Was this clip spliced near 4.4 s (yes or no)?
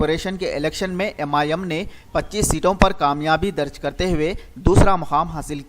yes